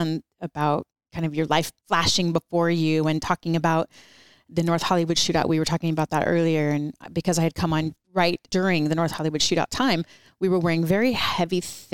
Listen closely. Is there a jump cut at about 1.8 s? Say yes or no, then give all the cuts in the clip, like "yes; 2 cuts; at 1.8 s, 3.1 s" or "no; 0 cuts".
yes; 3 cuts; at 1.0 s, 1.8 s, 8.3 s